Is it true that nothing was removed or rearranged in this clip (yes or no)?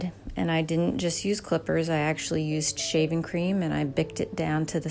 yes